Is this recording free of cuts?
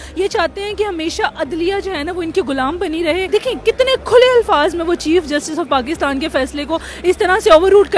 no; 1 cut; at 3.3 s

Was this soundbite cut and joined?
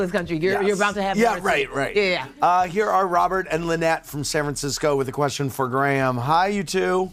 no; 0 cuts

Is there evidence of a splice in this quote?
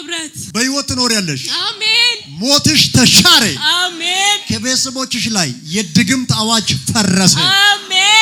no; 0 cuts

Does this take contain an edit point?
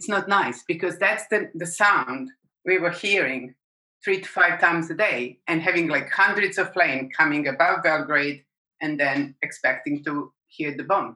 no; 0 cuts

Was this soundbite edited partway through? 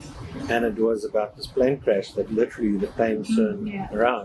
no; 0 cuts

